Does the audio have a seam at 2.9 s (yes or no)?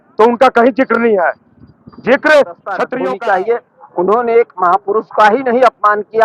yes